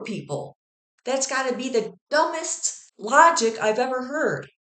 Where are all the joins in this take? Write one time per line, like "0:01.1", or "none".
0:00.9